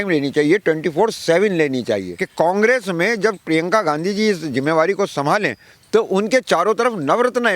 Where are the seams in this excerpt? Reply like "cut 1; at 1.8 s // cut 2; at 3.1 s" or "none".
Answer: cut 1; at 2.2 s